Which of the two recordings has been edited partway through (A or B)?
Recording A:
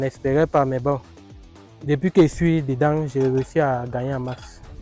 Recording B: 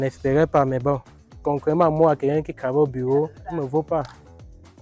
B